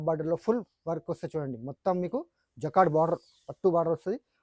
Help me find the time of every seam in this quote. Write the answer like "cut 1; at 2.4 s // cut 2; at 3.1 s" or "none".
none